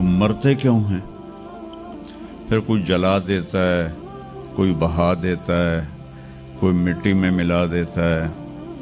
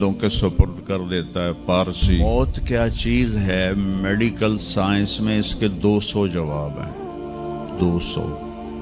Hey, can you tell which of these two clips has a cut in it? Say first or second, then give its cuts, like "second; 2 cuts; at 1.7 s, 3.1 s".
second; 1 cut; at 2.2 s